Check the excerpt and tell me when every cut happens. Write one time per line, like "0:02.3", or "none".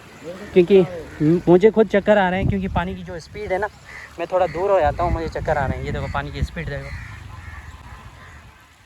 none